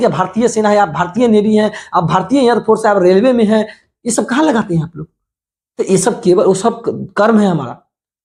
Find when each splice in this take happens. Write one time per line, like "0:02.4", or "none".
none

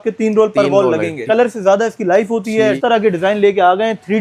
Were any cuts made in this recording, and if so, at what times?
0:01.2
0:02.8

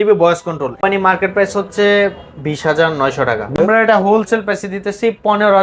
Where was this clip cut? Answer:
0:00.8
0:03.5

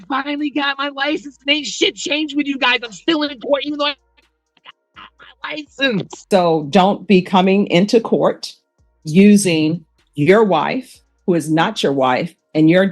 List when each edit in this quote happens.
0:06.1

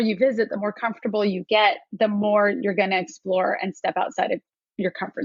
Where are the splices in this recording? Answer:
none

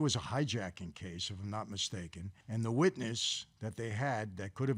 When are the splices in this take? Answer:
0:02.3

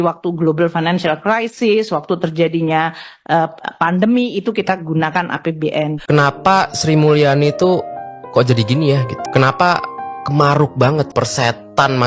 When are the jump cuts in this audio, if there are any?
0:06.0
0:09.2
0:11.1

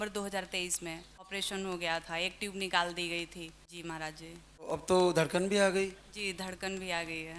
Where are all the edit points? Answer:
0:01.3
0:03.7
0:04.7

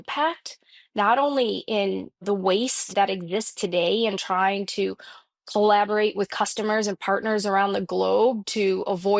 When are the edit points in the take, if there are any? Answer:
none

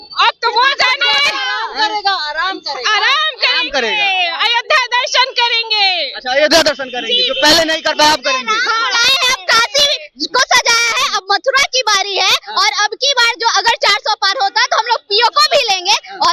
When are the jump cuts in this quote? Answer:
none

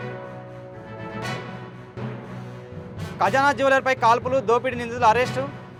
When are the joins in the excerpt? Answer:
none

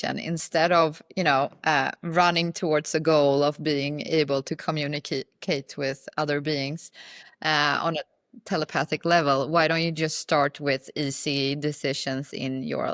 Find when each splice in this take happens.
none

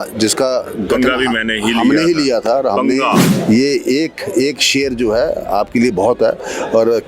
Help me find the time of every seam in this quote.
0:03.3

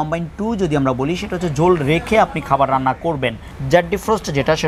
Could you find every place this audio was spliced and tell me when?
0:03.5

